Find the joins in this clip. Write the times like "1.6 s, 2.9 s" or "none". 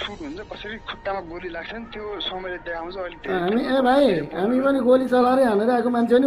none